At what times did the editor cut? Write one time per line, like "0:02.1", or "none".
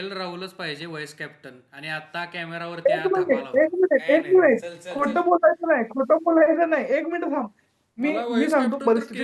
none